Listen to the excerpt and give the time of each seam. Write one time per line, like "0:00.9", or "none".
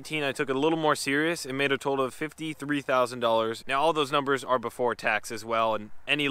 0:03.6